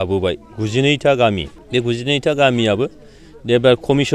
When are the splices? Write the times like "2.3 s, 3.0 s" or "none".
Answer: 1.5 s